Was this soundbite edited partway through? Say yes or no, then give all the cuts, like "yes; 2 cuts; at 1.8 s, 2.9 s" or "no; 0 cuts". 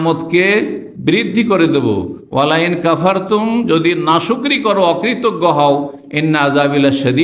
no; 0 cuts